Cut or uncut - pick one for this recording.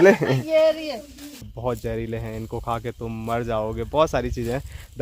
cut